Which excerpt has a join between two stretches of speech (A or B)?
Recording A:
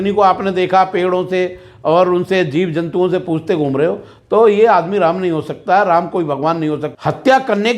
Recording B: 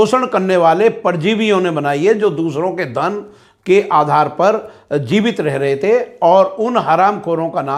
A